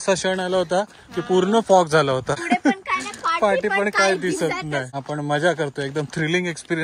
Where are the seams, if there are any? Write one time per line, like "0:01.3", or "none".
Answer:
0:02.4
0:04.9